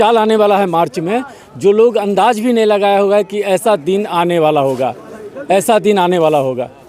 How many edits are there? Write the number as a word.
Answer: zero